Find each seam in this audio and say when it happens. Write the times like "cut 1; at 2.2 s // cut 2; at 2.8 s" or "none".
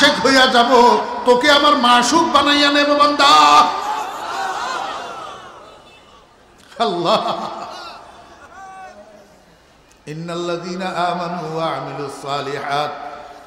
none